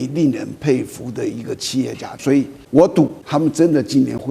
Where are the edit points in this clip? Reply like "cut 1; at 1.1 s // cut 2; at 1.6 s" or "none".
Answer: cut 1; at 2.1 s // cut 2; at 3.2 s